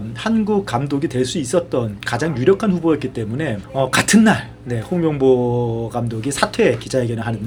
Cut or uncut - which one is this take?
uncut